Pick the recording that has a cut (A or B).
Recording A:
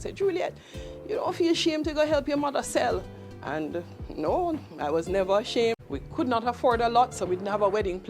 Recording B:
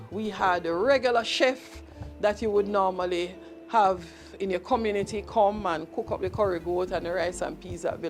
A